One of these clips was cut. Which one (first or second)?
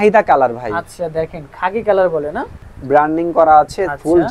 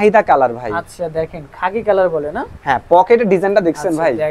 first